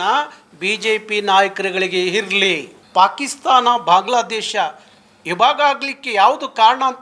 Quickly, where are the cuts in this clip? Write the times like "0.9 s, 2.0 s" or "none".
2.7 s

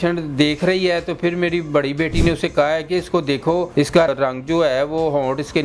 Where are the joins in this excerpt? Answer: 4.0 s

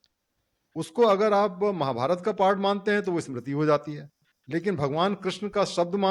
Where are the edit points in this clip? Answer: none

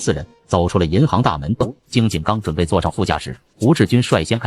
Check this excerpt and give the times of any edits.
1.6 s

